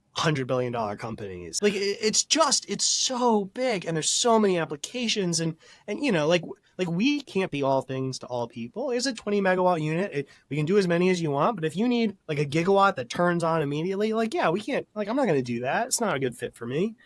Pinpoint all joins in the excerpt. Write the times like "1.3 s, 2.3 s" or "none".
1.4 s